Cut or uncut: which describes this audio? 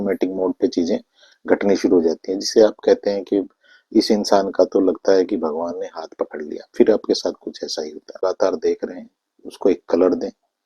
cut